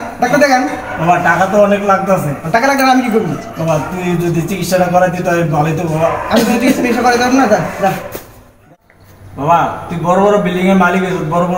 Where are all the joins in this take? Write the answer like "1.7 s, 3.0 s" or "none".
8.6 s